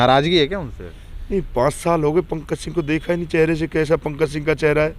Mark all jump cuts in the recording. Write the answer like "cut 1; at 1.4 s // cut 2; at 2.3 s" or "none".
none